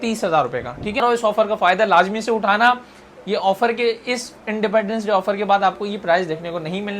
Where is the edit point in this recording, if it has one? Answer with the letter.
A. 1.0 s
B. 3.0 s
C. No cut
A